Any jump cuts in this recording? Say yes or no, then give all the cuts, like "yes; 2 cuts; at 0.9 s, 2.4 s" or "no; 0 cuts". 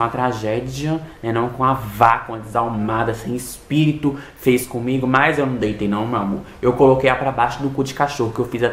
no; 0 cuts